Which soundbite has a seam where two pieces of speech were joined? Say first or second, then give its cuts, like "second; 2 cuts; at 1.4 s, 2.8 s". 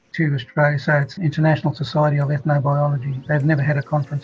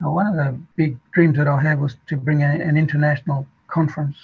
first; 2 cuts; at 1.1 s, 3.2 s